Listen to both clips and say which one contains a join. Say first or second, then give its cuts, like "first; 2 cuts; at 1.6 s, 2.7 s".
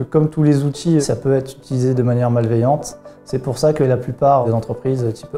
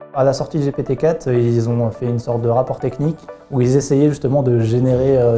first; 2 cuts; at 1.0 s, 4.4 s